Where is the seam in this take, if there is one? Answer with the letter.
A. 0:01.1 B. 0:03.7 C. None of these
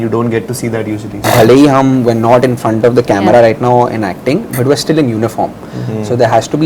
A